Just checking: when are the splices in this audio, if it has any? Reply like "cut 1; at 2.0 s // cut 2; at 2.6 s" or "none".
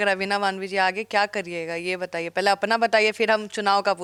none